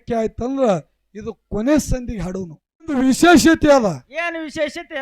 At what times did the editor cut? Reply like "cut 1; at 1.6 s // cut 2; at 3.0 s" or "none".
cut 1; at 3.0 s